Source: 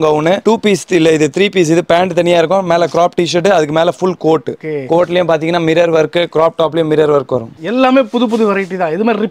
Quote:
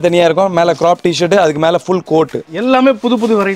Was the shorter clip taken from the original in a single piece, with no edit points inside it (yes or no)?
no